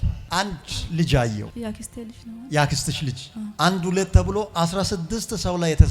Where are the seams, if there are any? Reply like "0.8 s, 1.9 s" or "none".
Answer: 3.6 s